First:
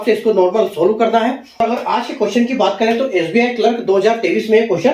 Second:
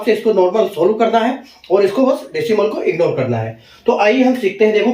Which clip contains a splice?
first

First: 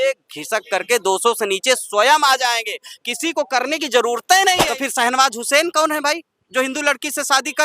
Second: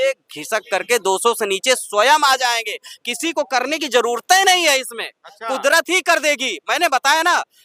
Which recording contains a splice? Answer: first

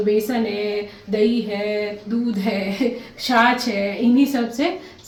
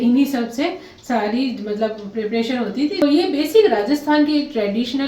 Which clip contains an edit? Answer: second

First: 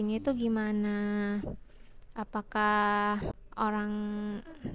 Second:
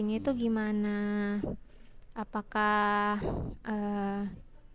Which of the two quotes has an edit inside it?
first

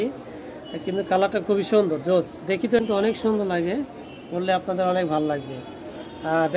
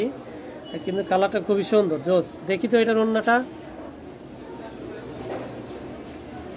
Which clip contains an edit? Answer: first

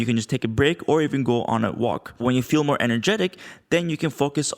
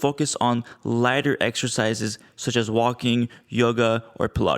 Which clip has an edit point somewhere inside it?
first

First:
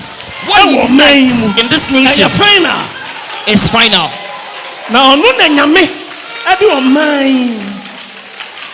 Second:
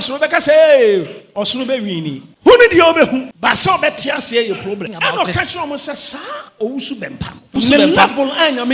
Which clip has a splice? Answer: second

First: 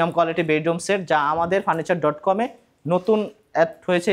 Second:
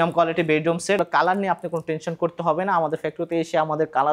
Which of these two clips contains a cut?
second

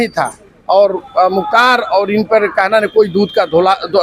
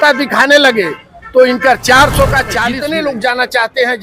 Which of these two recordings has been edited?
second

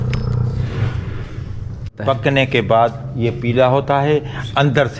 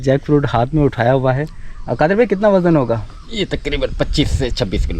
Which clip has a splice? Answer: first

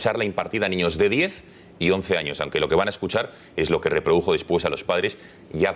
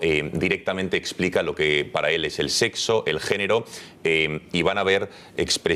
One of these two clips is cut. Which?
second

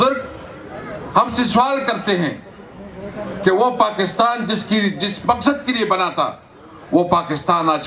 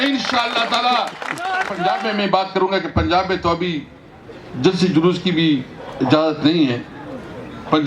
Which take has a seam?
second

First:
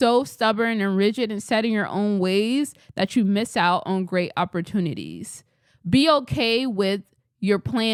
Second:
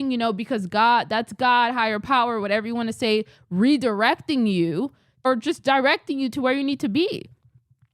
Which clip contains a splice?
second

